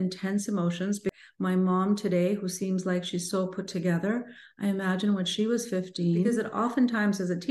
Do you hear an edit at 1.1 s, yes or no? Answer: yes